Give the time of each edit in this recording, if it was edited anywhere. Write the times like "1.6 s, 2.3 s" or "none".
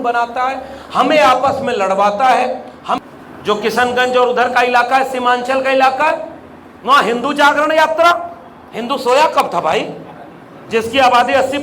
3.0 s